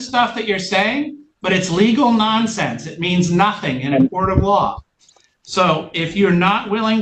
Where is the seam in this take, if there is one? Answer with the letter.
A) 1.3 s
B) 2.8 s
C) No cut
C